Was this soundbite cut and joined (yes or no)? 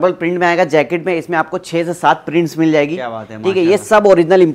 no